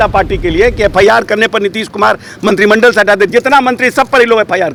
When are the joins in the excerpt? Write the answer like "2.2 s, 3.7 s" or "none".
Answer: none